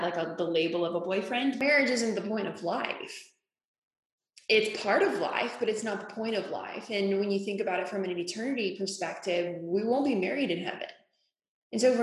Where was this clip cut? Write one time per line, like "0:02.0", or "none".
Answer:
0:01.6